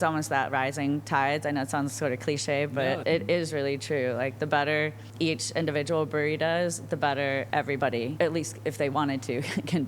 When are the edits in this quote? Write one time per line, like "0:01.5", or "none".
0:02.8
0:05.0
0:07.7